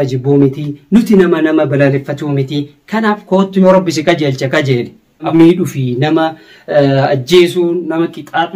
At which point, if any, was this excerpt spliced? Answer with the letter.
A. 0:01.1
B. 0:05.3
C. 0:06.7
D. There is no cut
B